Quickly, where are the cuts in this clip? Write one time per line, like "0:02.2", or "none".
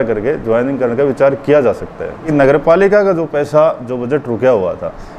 0:02.3